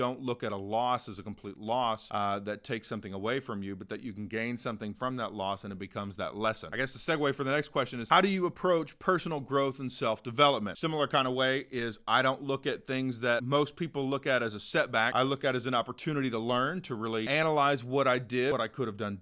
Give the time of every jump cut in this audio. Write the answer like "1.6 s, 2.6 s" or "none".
none